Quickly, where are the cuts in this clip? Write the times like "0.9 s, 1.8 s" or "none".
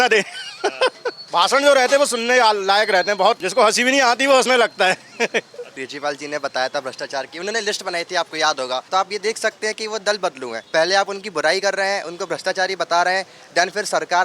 1.1 s, 3.4 s, 5.8 s, 8.9 s, 10.5 s